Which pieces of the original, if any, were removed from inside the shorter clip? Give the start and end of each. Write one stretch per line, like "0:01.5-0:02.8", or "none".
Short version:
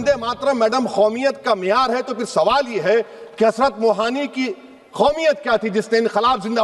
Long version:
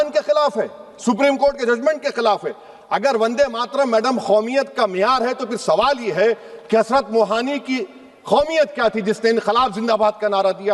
none